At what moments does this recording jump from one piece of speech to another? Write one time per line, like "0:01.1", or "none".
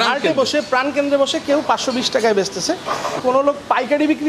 0:03.2